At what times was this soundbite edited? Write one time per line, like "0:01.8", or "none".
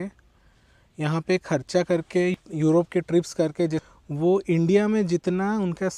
0:02.3
0:03.8

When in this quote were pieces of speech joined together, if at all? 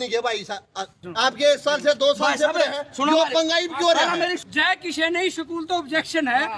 0:01.0
0:04.4

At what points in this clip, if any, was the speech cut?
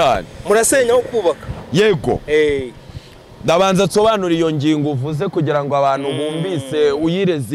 none

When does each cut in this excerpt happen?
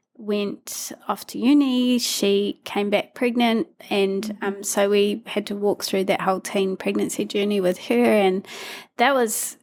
none

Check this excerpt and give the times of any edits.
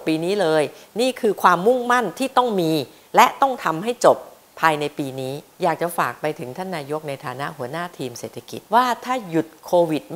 0:05.5
0:08.6

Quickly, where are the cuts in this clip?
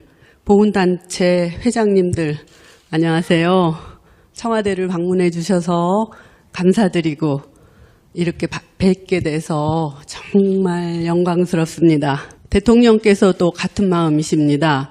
none

